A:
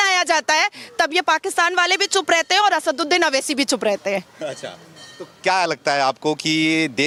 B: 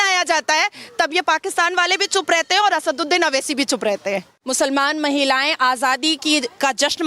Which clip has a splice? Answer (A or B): B